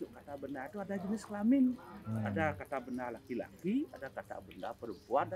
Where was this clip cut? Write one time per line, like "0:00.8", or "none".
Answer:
none

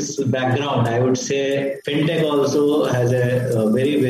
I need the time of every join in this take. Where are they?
0:01.8

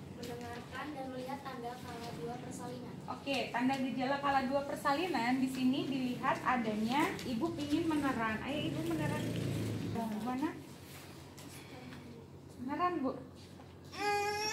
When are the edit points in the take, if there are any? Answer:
0:10.0

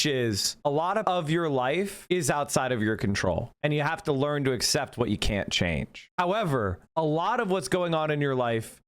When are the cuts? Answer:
0:01.0
0:02.0

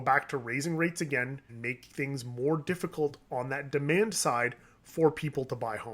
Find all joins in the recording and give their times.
0:01.5

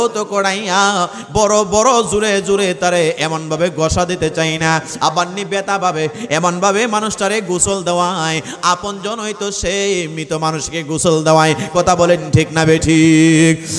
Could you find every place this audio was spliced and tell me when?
none

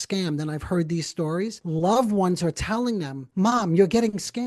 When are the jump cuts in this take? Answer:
0:01.6
0:03.2

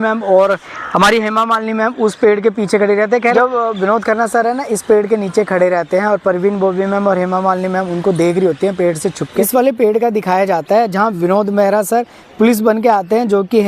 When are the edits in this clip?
0:03.3
0:09.5

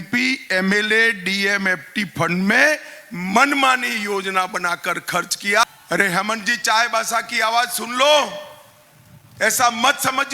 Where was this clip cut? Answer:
0:05.6

